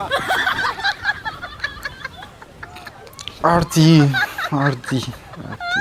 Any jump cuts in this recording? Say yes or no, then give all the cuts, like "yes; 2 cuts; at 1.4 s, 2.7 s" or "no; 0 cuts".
no; 0 cuts